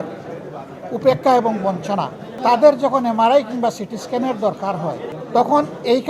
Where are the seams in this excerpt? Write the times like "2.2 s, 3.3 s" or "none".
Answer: 2.4 s, 5.1 s

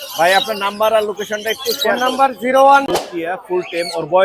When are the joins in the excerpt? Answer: 2.9 s

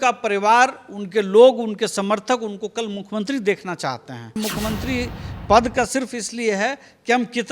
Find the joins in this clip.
4.4 s

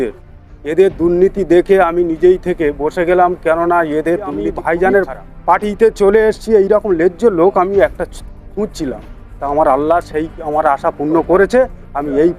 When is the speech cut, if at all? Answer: 4.6 s

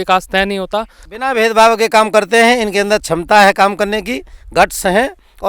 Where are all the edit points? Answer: 1.0 s

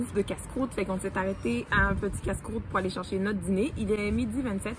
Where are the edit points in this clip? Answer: none

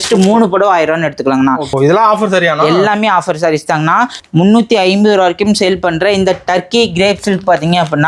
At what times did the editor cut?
1.8 s, 4.2 s

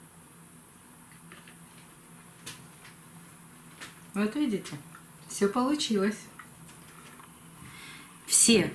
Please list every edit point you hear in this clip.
7.6 s

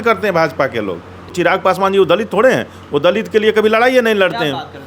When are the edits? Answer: 1.3 s

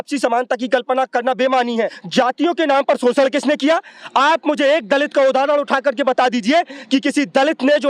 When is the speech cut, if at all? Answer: 2.0 s

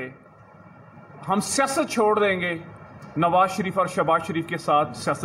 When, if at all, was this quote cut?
none

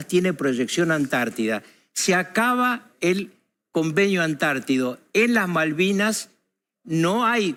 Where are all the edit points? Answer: none

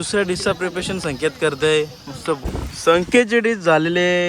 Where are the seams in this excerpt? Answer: 2.5 s

